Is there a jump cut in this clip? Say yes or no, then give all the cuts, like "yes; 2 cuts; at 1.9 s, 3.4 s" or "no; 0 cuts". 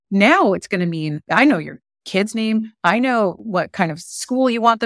yes; 1 cut; at 1.2 s